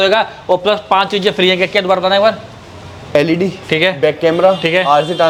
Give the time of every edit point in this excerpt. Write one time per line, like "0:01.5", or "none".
none